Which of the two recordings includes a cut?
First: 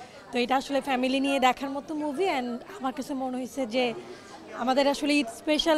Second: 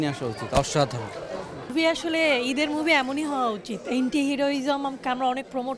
second; 1 cut; at 1.7 s

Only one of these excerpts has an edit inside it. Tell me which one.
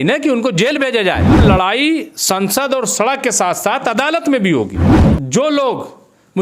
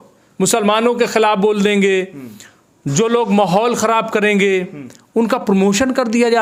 first; 2 cuts; at 1.4 s, 5.1 s

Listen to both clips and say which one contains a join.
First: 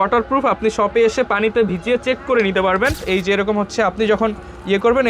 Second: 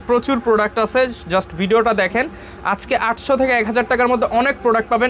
first; 1 cut; at 3.0 s

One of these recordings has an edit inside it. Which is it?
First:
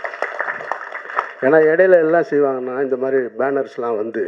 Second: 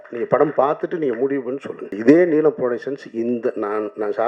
second; 1 cut; at 2.0 s

